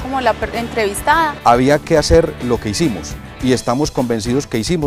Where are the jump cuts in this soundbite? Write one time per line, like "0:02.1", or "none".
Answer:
0:01.3